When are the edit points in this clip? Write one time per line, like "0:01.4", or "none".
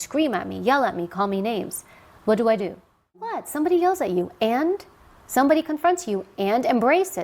0:03.3